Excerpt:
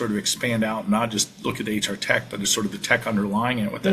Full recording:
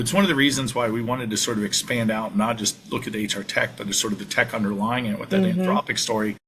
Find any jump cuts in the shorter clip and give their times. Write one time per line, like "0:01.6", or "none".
none